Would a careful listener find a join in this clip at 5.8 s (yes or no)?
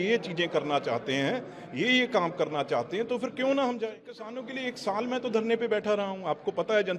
no